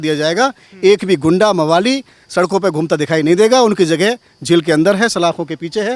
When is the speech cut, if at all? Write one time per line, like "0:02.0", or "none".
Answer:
none